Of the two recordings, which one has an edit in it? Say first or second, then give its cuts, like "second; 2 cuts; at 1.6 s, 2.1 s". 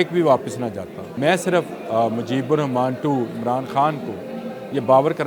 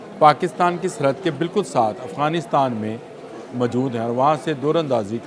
first; 1 cut; at 1.0 s